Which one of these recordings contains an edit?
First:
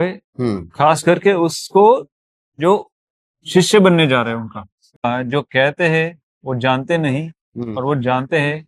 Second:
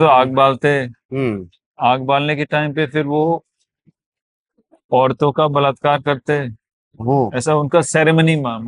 first; 1 cut; at 5.0 s

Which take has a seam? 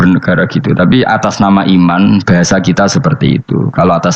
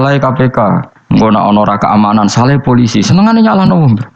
second; 1 cut; at 0.9 s

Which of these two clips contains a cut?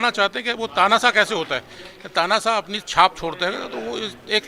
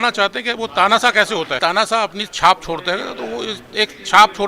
second; 1 cut; at 1.5 s

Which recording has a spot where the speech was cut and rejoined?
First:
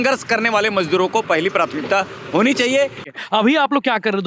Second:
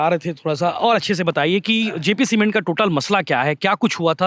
first; 1 cut; at 3.0 s

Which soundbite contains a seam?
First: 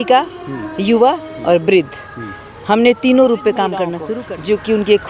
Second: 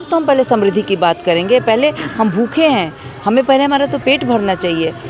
first; 1 cut; at 4.0 s

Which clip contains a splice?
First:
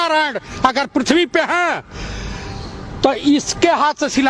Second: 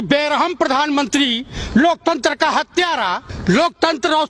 second; 1 cut; at 3.3 s

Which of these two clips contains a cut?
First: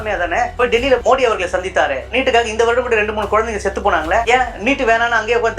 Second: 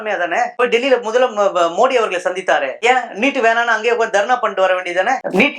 first; 3 cuts; at 1.0 s, 2.1 s, 4.2 s

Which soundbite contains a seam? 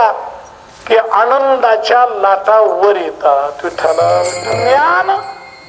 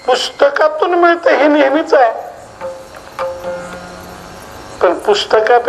first; 1 cut; at 4.4 s

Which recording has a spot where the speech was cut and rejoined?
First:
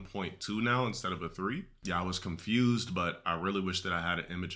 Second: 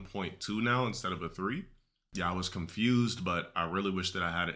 first; 1 cut; at 1.7 s

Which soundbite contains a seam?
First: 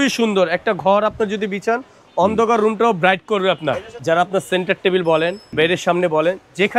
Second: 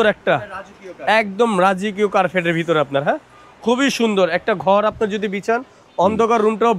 first; 2 cuts; at 3.9 s, 5.4 s

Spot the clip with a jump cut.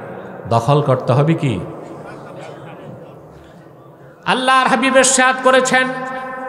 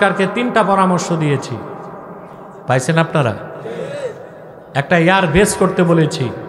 second; 1 cut; at 2.5 s

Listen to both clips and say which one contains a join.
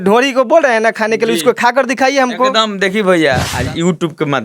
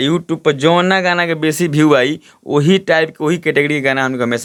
first; 1 cut; at 3.5 s

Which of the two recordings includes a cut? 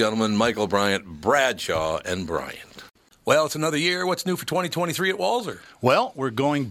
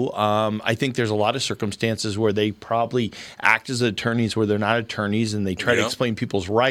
first; 1 cut; at 3.1 s

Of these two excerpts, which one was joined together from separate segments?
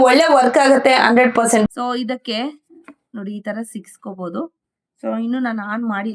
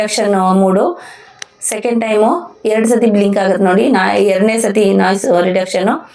first; 1 cut; at 1.7 s

